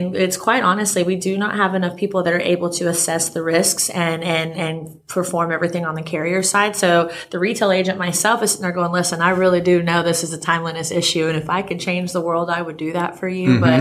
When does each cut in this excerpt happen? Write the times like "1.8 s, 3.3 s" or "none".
none